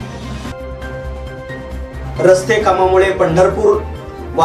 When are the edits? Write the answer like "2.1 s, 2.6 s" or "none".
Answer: none